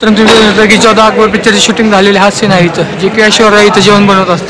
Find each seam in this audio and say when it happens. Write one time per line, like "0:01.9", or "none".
none

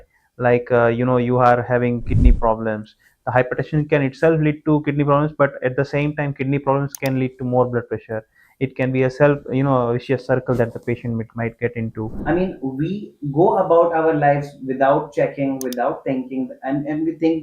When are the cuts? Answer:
0:12.1

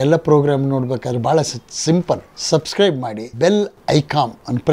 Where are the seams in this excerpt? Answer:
none

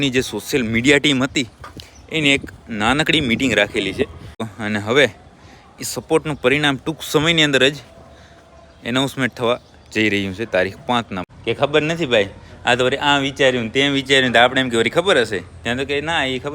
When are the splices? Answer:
0:04.5
0:11.2

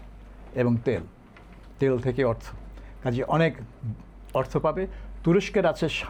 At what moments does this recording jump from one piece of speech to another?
none

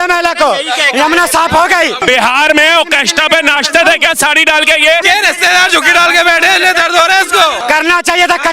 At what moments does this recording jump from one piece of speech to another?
0:02.0
0:05.0
0:07.6

